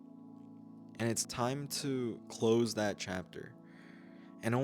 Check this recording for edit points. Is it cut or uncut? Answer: cut